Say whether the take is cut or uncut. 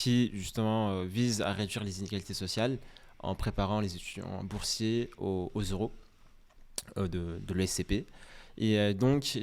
uncut